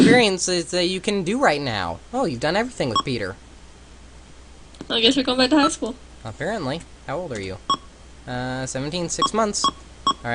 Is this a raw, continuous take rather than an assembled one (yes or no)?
no